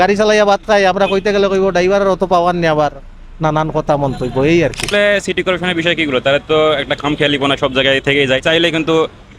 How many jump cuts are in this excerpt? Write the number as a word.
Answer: two